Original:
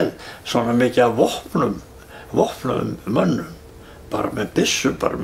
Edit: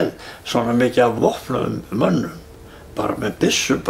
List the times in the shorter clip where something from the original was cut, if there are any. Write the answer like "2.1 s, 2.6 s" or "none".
1.1 s